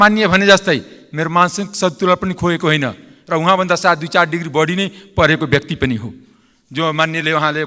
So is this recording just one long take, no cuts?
yes; 0 cuts

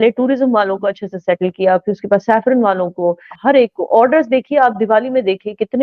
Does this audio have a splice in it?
yes; 1 cut; at 3.3 s

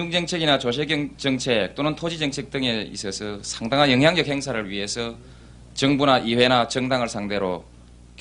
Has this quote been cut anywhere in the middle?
yes; 1 cut; at 6.2 s

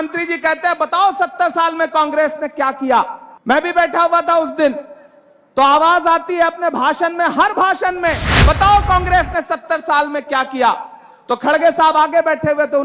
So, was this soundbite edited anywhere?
yes; 1 cut; at 3.3 s

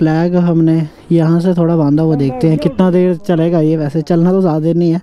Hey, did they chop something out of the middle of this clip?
no; 0 cuts

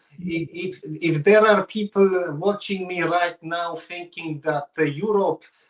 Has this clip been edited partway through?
no; 0 cuts

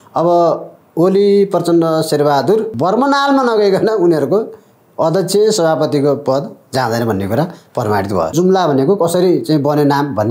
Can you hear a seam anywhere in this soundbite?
yes; 2 cuts; at 2.7 s, 8.3 s

